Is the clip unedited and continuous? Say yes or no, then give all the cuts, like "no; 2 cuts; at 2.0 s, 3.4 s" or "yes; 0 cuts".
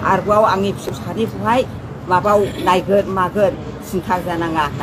no; 1 cut; at 0.9 s